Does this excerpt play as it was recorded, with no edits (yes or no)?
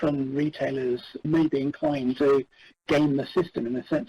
no